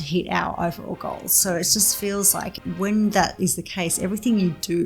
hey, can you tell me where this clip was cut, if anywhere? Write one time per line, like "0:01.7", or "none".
0:02.5